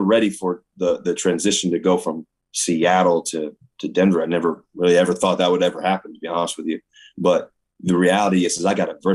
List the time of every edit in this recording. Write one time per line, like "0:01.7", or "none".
none